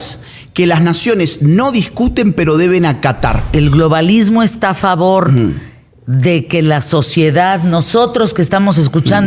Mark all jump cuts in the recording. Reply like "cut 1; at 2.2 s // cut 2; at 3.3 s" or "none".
cut 1; at 3.4 s